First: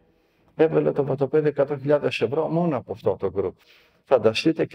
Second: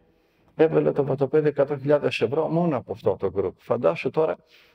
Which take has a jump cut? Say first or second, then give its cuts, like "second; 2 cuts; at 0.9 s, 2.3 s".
first; 1 cut; at 3.6 s